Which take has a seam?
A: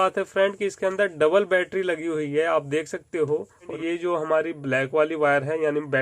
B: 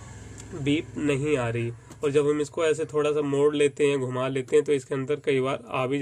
A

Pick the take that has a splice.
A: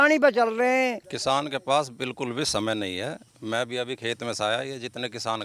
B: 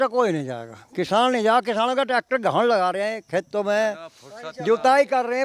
A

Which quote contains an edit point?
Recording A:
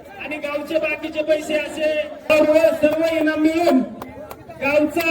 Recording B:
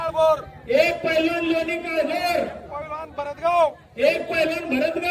A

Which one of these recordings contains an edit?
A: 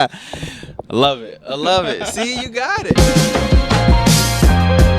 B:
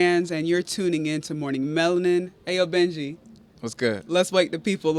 A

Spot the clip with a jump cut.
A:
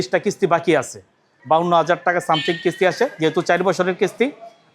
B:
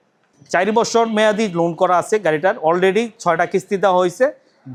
A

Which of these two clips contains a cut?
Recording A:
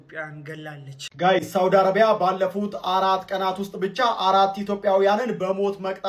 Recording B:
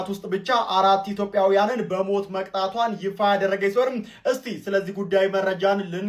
A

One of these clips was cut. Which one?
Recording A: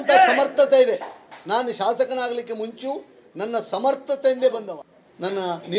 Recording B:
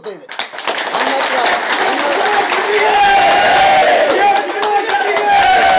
A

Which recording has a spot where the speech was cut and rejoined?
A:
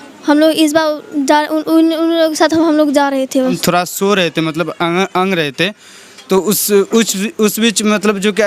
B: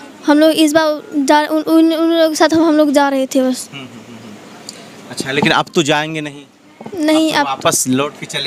A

